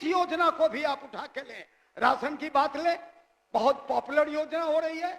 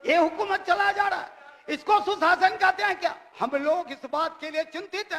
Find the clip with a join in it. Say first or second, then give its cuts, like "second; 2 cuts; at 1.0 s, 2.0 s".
second; 1 cut; at 3.2 s